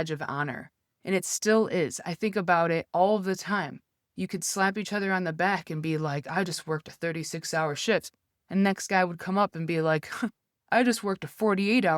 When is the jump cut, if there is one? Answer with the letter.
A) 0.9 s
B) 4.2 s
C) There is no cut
C